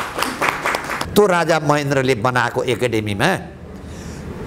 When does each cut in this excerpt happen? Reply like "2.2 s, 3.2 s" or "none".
1.0 s